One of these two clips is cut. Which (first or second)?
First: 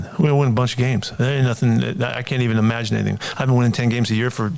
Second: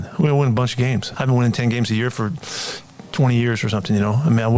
second